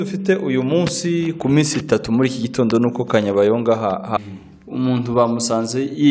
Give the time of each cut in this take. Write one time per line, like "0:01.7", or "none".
0:04.2